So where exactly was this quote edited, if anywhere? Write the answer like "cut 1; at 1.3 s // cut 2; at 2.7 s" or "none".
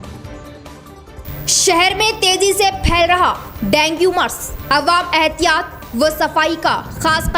cut 1; at 0.9 s